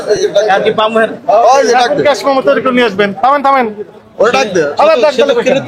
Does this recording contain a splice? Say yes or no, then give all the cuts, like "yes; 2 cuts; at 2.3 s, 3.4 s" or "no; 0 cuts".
no; 0 cuts